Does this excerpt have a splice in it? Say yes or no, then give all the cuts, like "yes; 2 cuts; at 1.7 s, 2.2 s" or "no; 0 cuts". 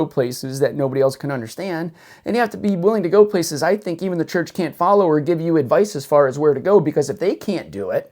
no; 0 cuts